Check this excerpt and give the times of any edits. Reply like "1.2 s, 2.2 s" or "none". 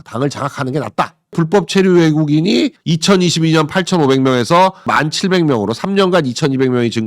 1.4 s, 2.8 s, 4.9 s